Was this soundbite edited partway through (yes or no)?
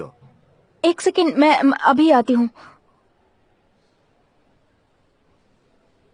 no